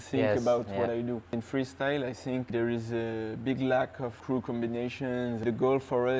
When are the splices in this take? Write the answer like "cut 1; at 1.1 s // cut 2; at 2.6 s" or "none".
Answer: cut 1; at 1.3 s // cut 2; at 2.5 s // cut 3; at 4.2 s // cut 4; at 5.4 s

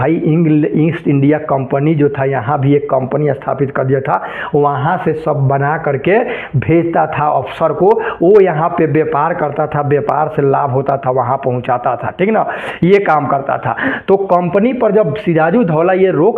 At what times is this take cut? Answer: none

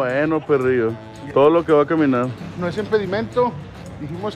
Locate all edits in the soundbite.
cut 1; at 1.2 s // cut 2; at 2.4 s

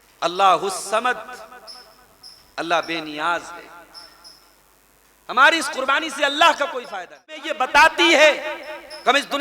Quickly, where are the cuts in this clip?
cut 1; at 7.5 s

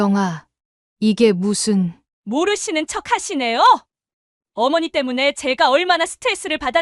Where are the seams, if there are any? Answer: none

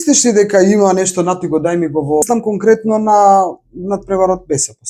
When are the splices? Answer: cut 1; at 2.2 s

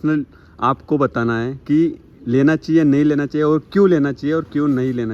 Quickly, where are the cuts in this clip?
none

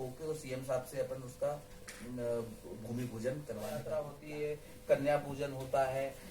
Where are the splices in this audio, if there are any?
cut 1; at 3.8 s

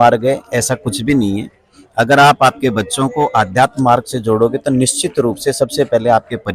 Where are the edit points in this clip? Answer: none

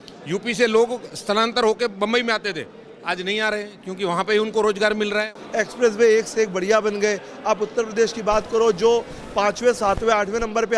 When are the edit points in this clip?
cut 1; at 5.4 s

